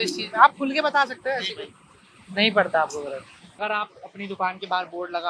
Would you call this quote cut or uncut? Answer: cut